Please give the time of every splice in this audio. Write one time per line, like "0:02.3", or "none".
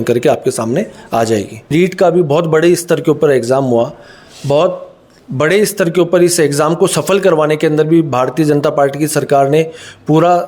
0:01.7